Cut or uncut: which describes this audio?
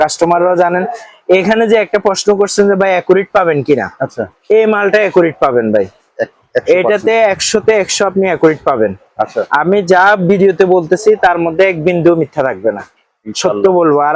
uncut